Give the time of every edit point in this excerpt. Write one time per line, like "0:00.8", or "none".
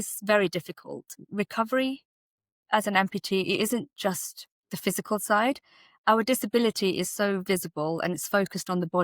0:01.2

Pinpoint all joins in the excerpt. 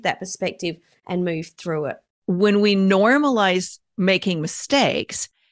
0:02.1

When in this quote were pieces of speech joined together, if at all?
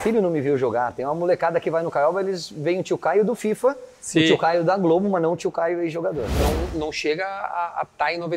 0:06.4

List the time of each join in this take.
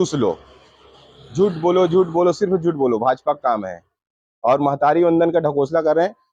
none

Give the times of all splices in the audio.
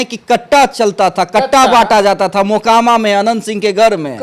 none

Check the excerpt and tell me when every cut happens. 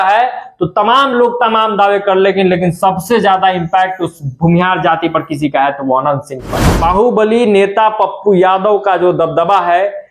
0:06.6

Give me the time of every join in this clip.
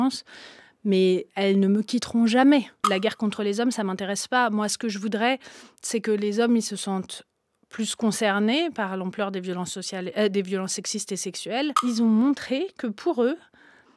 0:02.8
0:11.8

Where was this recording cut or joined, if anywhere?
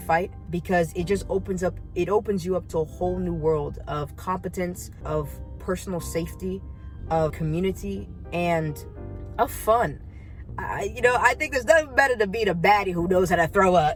none

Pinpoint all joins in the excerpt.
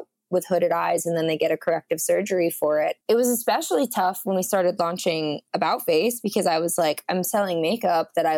0:03.0

